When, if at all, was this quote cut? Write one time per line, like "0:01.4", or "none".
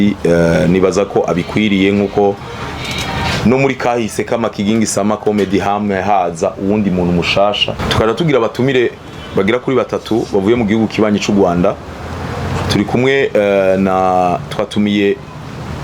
0:07.8